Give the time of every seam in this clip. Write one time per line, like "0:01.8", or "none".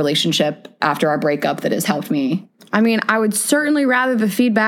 0:02.5